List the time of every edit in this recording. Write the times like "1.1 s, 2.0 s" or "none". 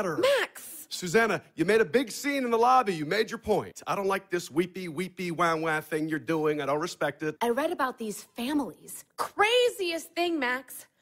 3.7 s, 7.4 s